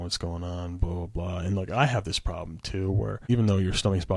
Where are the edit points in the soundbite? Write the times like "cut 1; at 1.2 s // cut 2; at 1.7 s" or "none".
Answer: cut 1; at 3.3 s